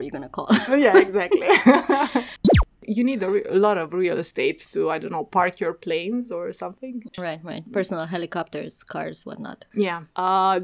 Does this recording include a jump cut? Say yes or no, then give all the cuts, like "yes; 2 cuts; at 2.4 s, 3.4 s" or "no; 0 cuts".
yes; 1 cut; at 2.5 s